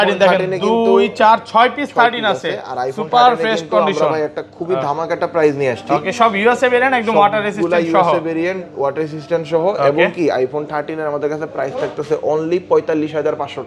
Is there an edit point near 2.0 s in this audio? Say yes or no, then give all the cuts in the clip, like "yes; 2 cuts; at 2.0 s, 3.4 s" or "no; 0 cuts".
no; 0 cuts